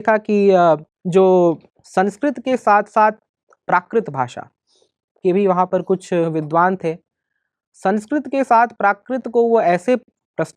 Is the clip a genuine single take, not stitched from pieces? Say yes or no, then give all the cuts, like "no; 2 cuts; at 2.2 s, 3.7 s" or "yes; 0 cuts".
no; 2 cuts; at 0.9 s, 1.7 s